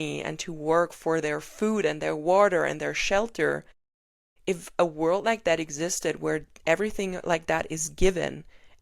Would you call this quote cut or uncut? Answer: uncut